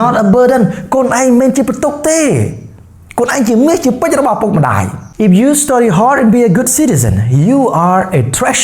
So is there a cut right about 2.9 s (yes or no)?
no